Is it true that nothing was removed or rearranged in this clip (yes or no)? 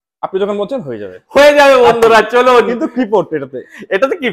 yes